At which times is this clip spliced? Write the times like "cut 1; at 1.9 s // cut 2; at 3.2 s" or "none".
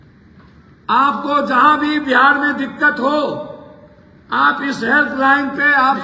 none